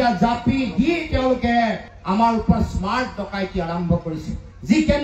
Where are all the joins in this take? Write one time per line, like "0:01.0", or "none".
none